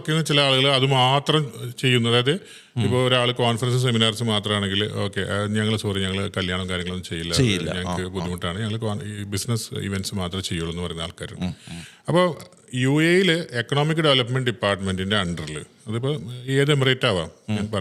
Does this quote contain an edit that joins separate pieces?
no; 0 cuts

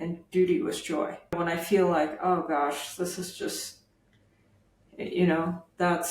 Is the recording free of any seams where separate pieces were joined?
no; 1 cut; at 1.3 s

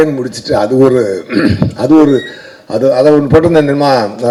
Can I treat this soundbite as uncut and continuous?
yes; 0 cuts

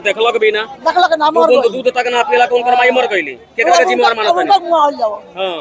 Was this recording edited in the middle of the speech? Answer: no; 0 cuts

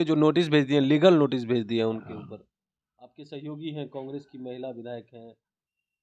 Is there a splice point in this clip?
no; 0 cuts

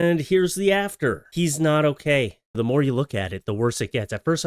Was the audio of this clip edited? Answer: yes; 1 cut; at 2.5 s

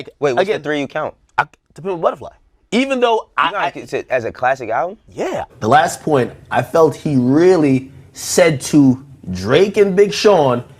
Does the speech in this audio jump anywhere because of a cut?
yes; 1 cut; at 5.5 s

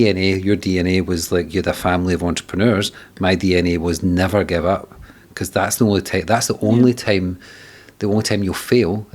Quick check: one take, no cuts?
yes; 0 cuts

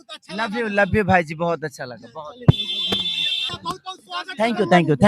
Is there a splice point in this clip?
yes; 1 cut; at 3.5 s

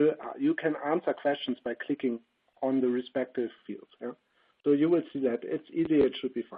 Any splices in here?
no; 0 cuts

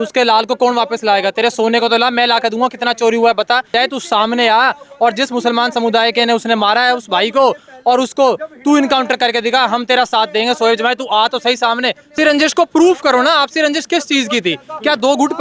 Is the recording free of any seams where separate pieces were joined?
no; 2 cuts; at 3.7 s, 12.1 s

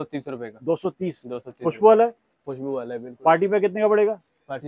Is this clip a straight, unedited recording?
yes; 0 cuts

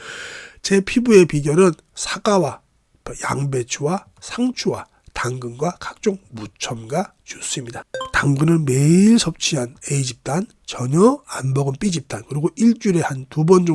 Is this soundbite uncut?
no; 1 cut; at 7.8 s

